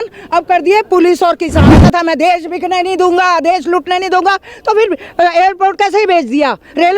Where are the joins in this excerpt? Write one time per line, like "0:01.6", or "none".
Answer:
0:01.6

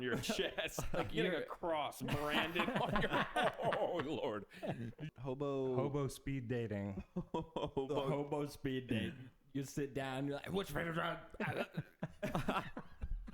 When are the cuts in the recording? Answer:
0:05.1

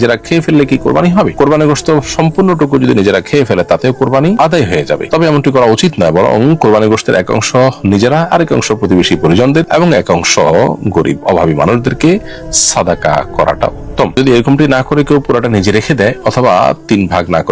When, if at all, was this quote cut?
none

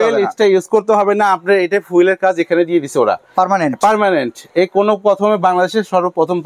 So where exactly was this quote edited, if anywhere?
none

